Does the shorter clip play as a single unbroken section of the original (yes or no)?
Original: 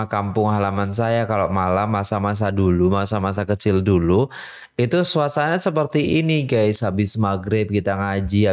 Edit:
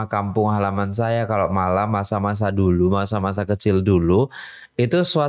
yes